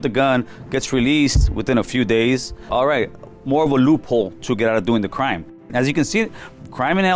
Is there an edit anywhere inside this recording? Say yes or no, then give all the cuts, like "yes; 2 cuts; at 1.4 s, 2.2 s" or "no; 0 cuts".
yes; 2 cuts; at 2.7 s, 5.7 s